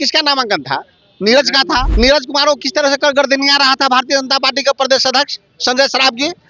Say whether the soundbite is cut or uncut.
cut